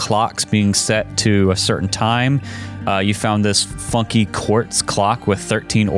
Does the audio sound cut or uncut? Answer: uncut